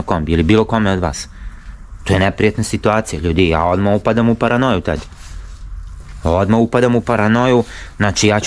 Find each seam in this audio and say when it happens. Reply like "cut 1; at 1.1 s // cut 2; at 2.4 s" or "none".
none

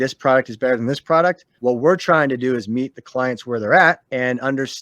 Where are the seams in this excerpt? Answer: cut 1; at 1.5 s // cut 2; at 4.0 s

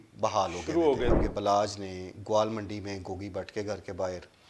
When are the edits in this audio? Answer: cut 1; at 1.2 s

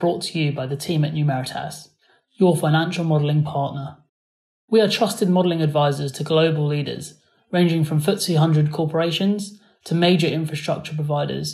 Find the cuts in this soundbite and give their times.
none

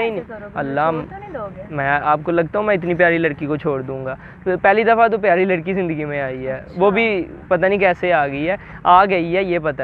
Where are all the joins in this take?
none

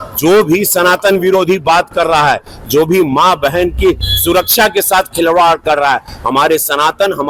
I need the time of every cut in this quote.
none

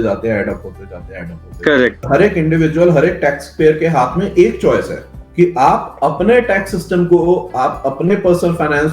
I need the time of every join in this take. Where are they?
cut 1; at 2.0 s

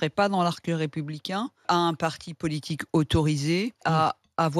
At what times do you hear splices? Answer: cut 1; at 1.6 s // cut 2; at 3.8 s

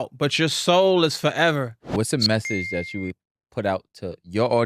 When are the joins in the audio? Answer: cut 1; at 1.8 s

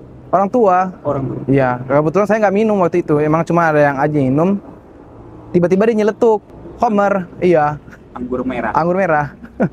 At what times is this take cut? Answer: cut 1; at 6.6 s

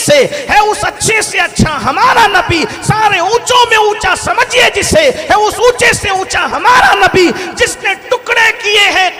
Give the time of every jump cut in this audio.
none

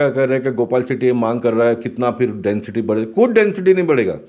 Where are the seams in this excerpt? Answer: none

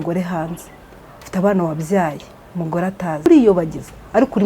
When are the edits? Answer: cut 1; at 3.3 s

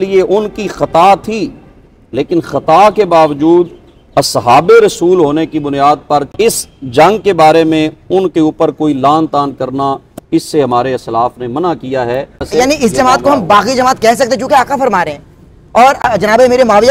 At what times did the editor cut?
cut 1; at 6.3 s // cut 2; at 12.5 s

